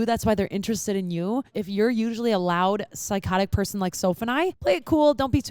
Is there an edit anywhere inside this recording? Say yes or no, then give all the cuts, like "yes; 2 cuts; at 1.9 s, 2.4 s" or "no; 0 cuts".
yes; 2 cuts; at 1.6 s, 4.6 s